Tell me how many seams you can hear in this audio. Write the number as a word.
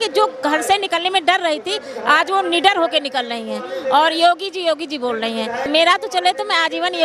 one